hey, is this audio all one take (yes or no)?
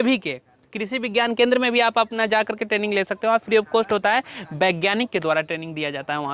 yes